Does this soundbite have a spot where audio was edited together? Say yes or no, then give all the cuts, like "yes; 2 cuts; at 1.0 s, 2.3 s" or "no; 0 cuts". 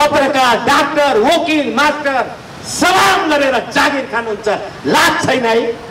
no; 0 cuts